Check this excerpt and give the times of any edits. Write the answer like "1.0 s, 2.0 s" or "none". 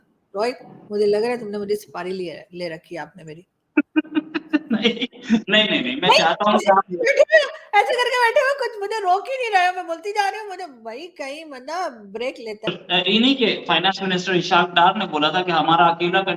12.7 s